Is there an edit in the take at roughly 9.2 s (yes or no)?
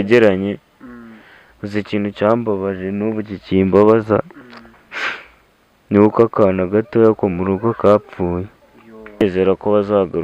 yes